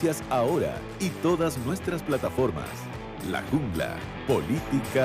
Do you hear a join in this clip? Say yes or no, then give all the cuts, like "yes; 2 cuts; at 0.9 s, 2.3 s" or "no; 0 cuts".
yes; 1 cut; at 4.1 s